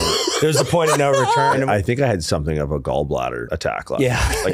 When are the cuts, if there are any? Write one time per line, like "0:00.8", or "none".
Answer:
0:01.6
0:03.5